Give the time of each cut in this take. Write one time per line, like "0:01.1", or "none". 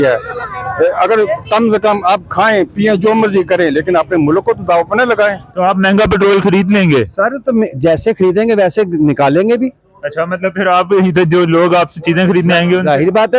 0:05.4